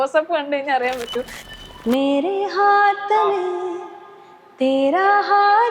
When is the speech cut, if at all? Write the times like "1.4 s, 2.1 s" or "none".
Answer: 1.4 s